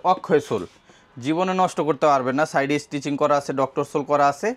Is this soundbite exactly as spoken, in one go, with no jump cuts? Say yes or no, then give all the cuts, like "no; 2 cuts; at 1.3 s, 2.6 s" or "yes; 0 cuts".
yes; 0 cuts